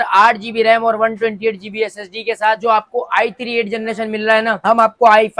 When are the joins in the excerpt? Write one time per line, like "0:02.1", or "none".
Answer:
0:02.6